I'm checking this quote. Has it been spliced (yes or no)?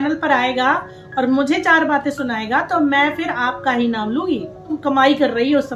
yes